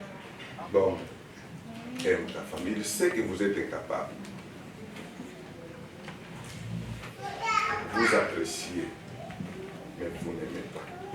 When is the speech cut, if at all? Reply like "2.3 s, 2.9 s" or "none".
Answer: none